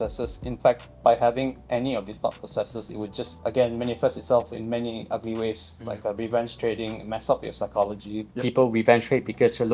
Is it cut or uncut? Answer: cut